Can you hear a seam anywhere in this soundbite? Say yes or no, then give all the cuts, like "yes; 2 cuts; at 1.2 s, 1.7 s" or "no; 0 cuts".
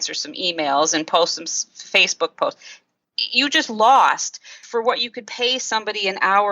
yes; 1 cut; at 4.6 s